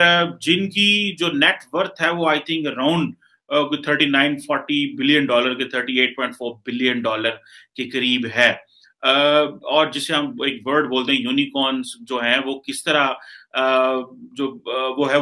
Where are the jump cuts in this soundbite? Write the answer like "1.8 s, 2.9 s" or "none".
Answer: none